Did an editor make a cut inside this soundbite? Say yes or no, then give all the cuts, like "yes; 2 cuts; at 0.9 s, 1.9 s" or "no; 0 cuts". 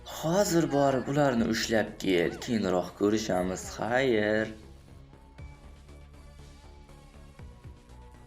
yes; 1 cut; at 4.6 s